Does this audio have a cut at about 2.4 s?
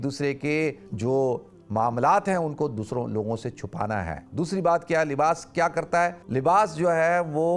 no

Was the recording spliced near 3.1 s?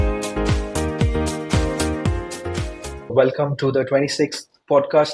yes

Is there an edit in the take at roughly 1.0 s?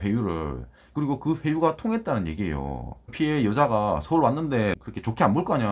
no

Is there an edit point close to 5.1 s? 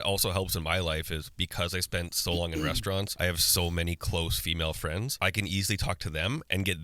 yes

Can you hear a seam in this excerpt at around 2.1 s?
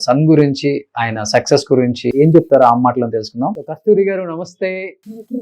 yes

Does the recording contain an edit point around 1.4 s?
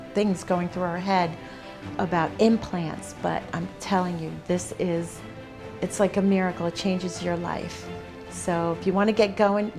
no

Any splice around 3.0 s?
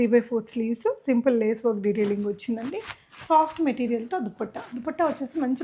no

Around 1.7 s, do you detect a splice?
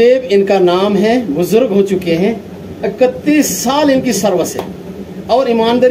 no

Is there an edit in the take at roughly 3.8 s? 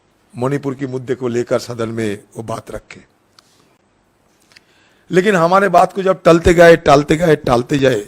yes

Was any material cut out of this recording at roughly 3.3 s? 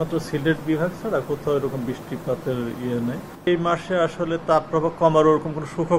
yes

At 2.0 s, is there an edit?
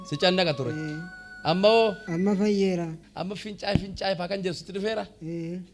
yes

